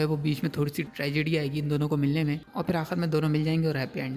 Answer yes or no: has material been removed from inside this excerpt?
no